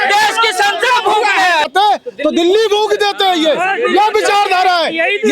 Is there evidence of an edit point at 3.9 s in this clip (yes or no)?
no